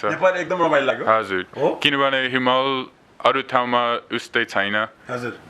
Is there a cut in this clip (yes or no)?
no